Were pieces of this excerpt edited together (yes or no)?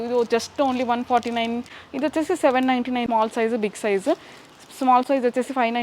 yes